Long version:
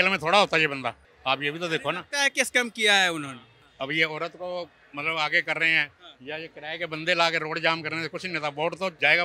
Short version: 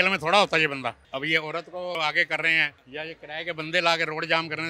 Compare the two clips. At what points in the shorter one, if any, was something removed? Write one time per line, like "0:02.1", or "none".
0:01.0
0:02.0
0:02.8